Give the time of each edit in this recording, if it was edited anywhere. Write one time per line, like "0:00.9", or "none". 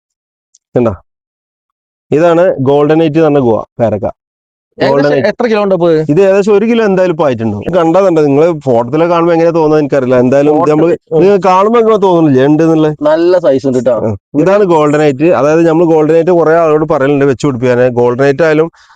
0:07.7